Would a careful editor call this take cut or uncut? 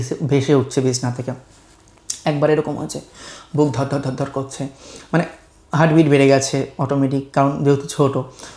uncut